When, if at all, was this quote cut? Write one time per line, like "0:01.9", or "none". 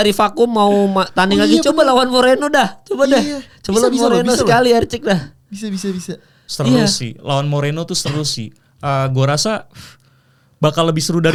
none